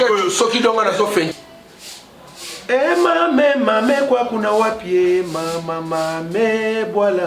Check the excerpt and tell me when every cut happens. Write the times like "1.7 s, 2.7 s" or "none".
1.3 s